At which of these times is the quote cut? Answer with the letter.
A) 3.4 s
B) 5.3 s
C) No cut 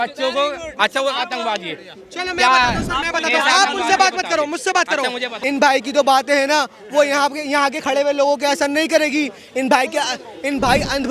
B